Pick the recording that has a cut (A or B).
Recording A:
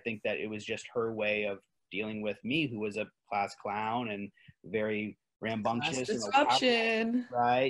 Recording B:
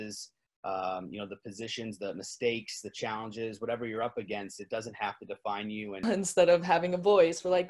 B